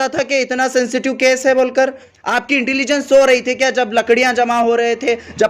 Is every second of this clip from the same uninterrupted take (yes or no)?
no